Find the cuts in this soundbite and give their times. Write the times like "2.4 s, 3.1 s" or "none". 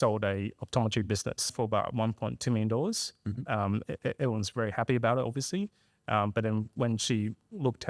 1.5 s